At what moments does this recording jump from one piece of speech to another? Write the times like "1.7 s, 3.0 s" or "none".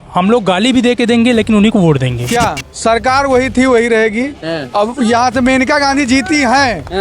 2.2 s